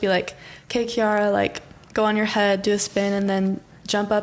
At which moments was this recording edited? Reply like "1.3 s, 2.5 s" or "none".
none